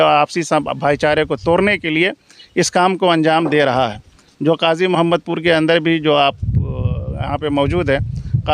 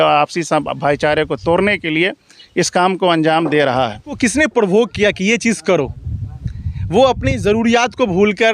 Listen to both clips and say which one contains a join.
second; 1 cut; at 4.2 s

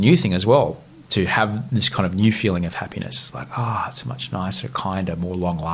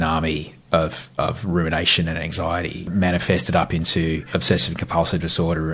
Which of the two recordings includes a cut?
second; 2 cuts; at 2.9 s, 4.3 s

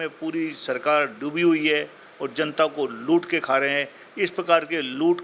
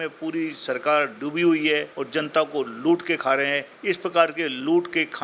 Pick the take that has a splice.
second; 2 cuts; at 2.0 s, 3.7 s

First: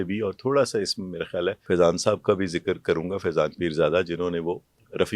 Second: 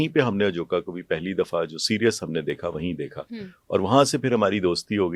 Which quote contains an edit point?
first; 1 cut; at 1.6 s

